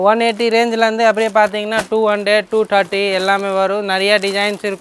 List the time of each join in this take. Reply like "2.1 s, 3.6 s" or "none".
none